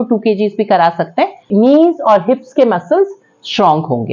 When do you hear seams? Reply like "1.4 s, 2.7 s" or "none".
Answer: 1.4 s